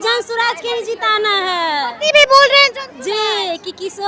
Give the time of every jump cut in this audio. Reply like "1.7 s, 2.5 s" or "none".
none